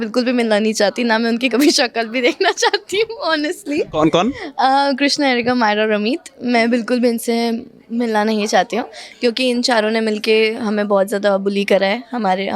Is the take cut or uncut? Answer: uncut